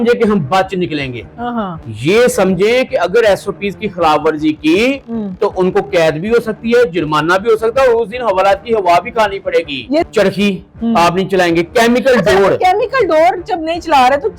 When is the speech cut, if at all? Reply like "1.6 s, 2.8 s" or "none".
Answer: 10.1 s